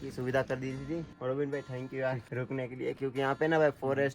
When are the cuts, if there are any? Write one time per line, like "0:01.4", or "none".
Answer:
0:01.1
0:02.2